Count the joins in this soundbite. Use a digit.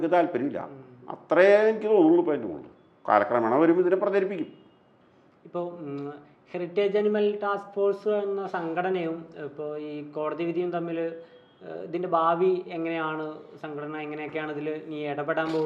0